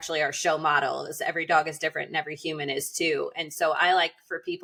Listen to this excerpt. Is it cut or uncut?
uncut